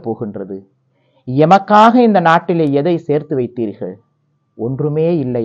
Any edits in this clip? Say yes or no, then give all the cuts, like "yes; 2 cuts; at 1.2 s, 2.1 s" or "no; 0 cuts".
no; 0 cuts